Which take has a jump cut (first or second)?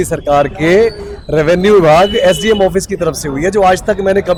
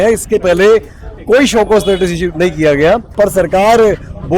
second